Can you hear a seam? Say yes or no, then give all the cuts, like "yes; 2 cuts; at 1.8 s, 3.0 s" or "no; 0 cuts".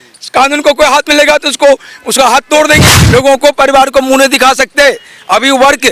yes; 1 cut; at 3.0 s